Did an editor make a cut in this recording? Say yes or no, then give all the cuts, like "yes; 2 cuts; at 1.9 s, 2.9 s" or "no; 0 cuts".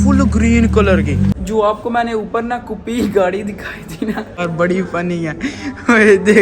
yes; 2 cuts; at 1.4 s, 4.3 s